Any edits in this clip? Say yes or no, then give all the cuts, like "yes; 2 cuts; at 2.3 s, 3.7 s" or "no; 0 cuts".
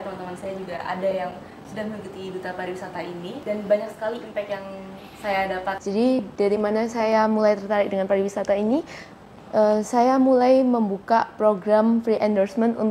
yes; 2 cuts; at 3.4 s, 5.8 s